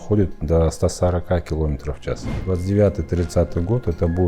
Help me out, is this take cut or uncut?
cut